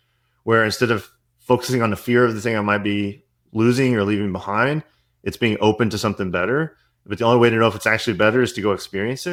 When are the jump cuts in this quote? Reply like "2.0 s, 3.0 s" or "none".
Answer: none